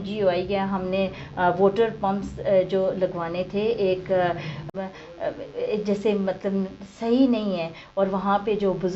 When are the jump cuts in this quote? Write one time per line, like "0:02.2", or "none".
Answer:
0:04.7

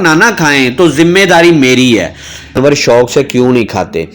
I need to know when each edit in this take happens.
0:02.6

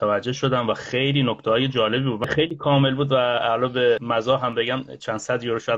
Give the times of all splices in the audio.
0:04.0

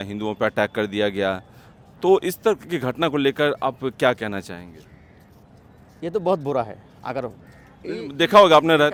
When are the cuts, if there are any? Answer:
none

